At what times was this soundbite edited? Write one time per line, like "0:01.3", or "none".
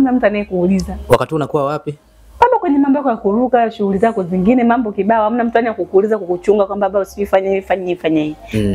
none